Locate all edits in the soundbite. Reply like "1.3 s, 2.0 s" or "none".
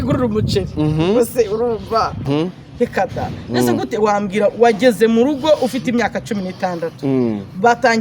2.2 s